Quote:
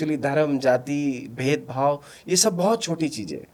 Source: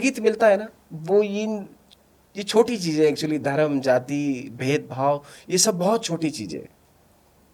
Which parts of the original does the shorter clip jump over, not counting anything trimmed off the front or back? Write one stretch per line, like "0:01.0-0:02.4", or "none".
none